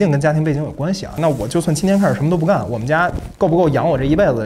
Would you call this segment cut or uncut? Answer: cut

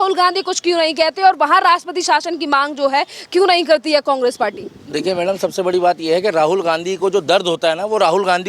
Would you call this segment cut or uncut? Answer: uncut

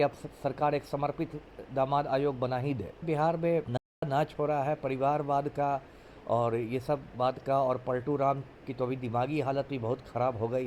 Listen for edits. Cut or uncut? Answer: cut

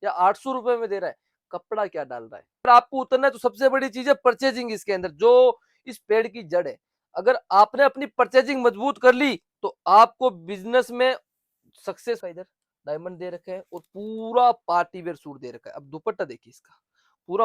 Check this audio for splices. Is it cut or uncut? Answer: cut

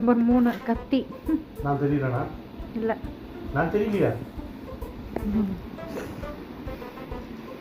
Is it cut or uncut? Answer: uncut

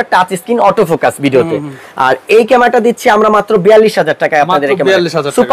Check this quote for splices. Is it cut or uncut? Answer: uncut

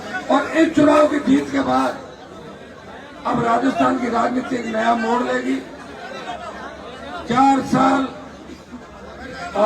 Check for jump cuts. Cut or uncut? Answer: uncut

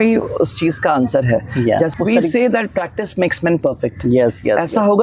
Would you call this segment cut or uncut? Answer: cut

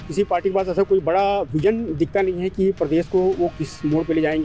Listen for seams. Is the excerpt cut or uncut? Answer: uncut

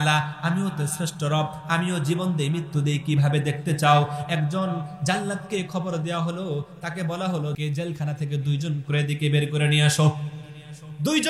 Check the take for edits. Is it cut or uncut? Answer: cut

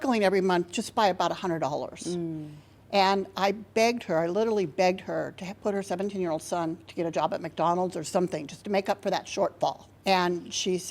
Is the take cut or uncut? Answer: cut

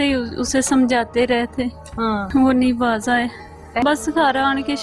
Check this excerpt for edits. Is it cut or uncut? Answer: cut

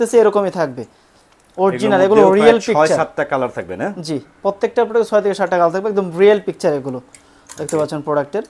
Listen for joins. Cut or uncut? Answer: uncut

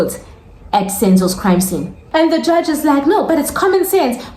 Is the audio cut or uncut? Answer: cut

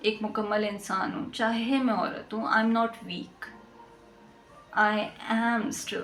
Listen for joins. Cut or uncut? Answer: uncut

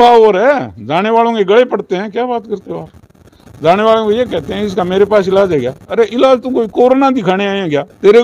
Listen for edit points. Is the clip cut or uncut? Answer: uncut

